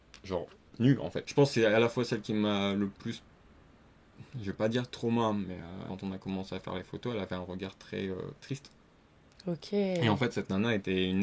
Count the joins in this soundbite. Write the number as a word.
two